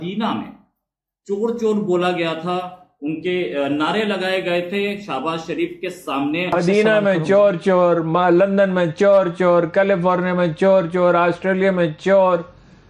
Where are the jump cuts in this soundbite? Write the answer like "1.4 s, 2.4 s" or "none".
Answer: 6.5 s